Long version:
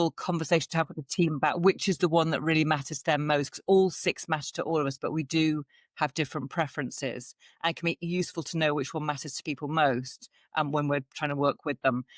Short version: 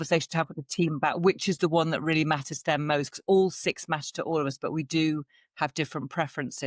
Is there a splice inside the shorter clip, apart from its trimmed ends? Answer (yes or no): no